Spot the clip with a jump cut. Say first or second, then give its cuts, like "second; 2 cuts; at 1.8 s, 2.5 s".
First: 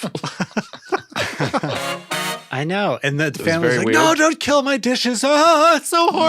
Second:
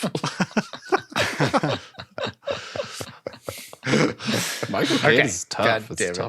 first; 1 cut; at 2.3 s